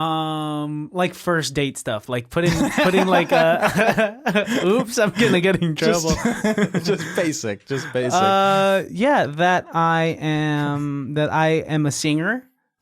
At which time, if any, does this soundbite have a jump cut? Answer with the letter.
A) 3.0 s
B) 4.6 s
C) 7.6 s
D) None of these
D